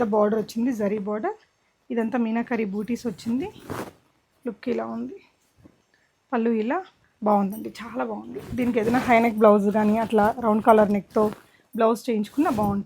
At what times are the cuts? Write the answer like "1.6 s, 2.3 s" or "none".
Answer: 7.0 s